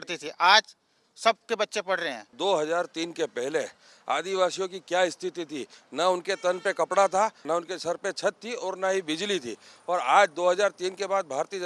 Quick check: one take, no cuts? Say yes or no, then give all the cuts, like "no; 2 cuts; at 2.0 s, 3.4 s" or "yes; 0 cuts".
no; 1 cut; at 2.3 s